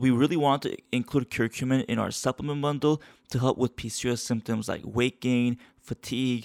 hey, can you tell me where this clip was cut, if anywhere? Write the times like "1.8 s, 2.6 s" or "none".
none